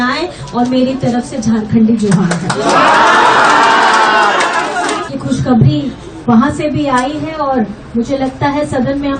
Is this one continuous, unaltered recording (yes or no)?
no